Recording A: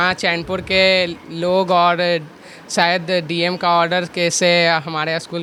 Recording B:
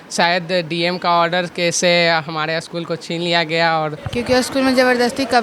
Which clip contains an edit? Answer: B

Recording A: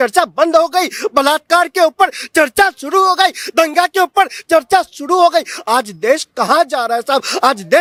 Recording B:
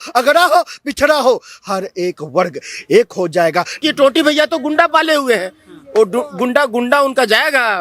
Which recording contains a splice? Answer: B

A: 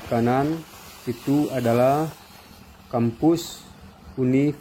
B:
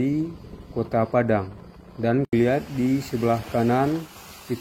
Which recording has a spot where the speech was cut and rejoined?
B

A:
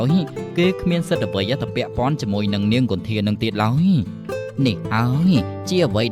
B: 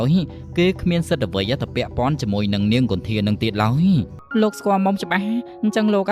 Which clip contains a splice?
B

